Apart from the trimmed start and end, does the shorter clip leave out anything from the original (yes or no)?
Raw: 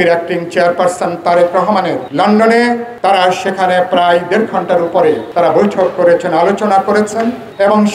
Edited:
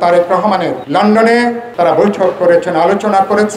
yes